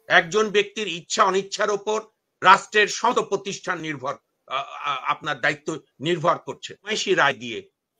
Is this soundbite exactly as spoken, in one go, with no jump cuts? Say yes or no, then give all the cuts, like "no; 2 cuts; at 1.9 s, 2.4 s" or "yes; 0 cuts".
no; 1 cut; at 6.9 s